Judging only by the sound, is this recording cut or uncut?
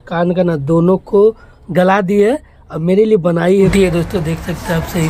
cut